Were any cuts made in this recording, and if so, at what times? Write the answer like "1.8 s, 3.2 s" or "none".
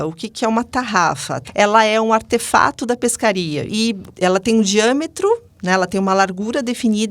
1.4 s, 3.9 s